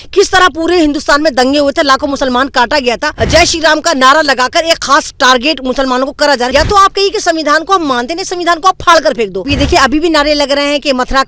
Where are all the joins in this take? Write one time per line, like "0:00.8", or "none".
0:03.1
0:06.5
0:09.5